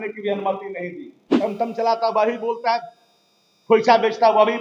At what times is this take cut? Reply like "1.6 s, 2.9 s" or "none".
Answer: 1.2 s